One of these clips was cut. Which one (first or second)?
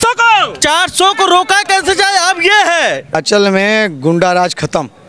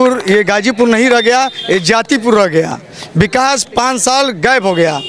first